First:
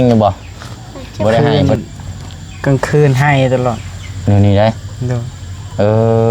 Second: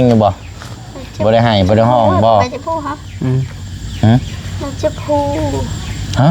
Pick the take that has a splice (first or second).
first